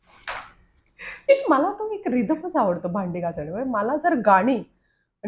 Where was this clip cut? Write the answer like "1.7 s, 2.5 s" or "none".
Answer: 1.3 s